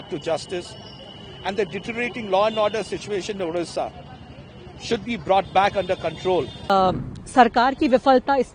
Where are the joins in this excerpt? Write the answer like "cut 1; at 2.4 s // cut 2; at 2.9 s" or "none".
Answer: cut 1; at 6.7 s